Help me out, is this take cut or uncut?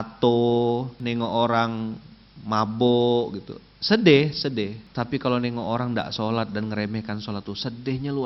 cut